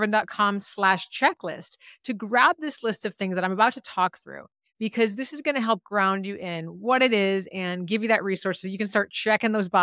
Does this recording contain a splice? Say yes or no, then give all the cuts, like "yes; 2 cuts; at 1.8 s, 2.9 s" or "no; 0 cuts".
no; 0 cuts